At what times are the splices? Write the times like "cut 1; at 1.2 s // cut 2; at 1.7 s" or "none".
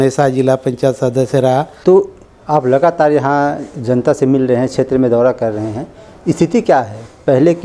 cut 1; at 1.7 s